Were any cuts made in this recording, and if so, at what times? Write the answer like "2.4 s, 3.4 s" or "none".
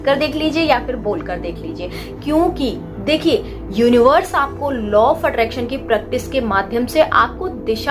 none